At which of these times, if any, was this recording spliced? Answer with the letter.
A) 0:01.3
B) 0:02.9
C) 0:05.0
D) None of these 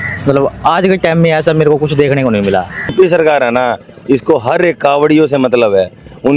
B